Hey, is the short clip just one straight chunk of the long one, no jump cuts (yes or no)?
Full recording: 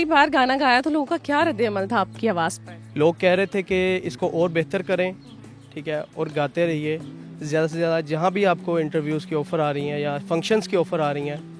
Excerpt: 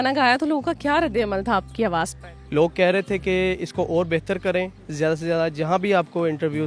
no